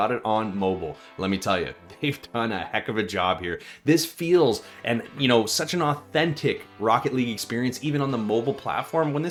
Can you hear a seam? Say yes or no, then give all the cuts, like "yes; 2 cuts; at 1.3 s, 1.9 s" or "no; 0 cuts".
no; 0 cuts